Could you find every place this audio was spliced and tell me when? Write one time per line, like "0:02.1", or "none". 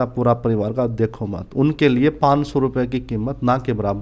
none